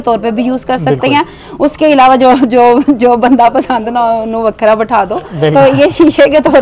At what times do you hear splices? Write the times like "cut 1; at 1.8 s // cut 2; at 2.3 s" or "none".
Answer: none